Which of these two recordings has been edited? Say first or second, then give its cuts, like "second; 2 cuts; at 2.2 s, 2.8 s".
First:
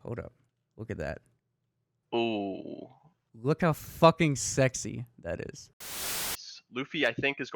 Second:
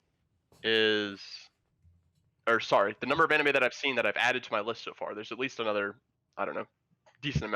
first; 1 cut; at 6.2 s